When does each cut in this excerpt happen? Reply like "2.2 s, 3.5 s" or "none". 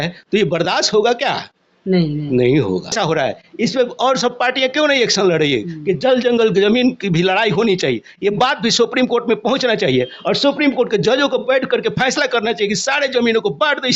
2.9 s